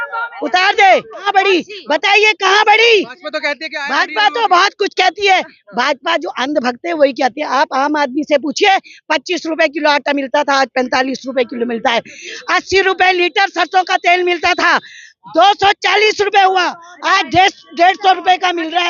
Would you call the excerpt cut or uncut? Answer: cut